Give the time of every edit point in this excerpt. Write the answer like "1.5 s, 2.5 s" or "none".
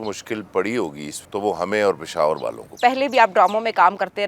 1.1 s, 2.8 s